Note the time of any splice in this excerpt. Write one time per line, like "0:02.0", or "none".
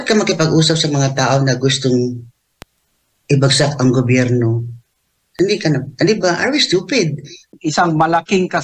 0:07.4